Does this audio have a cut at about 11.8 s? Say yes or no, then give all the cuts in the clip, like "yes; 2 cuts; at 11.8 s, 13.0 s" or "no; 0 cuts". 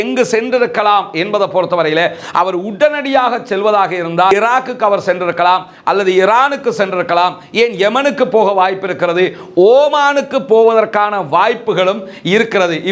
no; 1 cut; at 4.3 s